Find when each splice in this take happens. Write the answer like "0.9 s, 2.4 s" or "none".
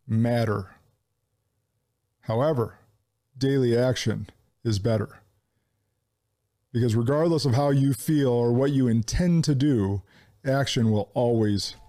none